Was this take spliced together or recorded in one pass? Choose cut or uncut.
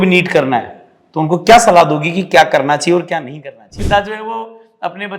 cut